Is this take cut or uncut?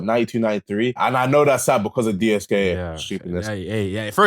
cut